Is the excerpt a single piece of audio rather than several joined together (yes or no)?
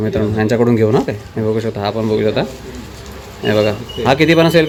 yes